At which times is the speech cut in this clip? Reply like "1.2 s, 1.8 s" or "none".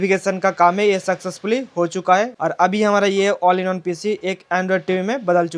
2.3 s